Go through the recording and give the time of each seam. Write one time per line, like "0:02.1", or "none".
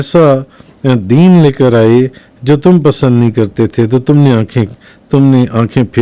none

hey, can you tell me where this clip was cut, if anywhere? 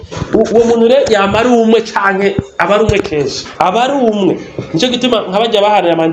0:03.4

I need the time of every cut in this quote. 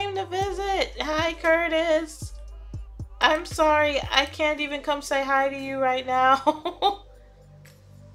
0:07.1

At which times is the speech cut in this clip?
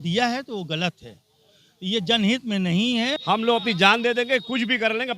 0:03.2

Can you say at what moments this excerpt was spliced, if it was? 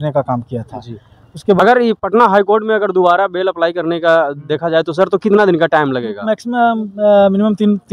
0:01.6

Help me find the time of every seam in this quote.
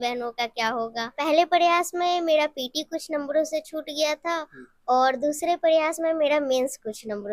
0:01.2

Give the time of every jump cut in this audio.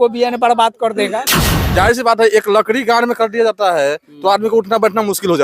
0:01.4

